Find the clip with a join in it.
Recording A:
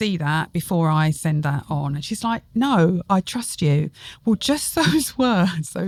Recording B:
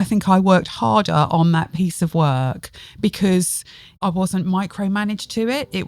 B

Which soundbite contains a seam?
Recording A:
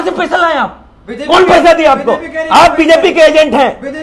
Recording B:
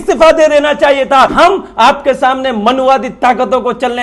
B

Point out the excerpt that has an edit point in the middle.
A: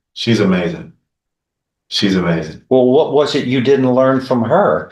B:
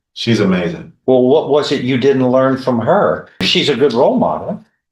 B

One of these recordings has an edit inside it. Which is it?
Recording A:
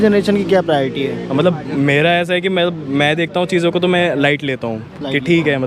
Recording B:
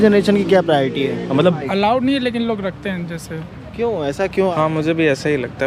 B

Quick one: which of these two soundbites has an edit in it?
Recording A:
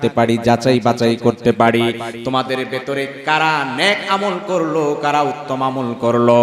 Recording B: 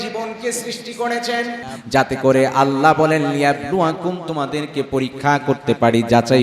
B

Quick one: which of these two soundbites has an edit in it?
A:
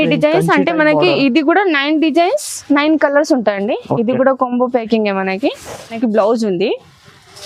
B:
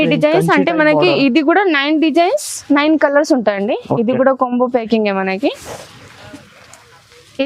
A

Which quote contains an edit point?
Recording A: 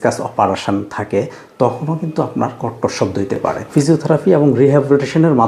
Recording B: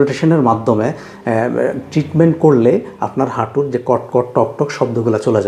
A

